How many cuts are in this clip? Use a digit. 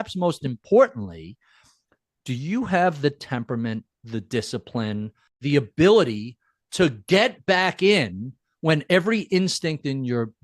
1